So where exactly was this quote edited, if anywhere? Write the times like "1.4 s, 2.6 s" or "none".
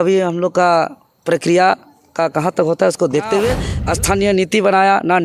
3.7 s